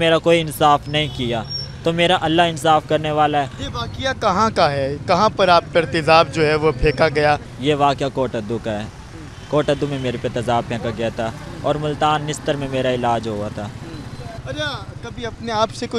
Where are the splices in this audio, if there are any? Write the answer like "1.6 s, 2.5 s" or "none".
none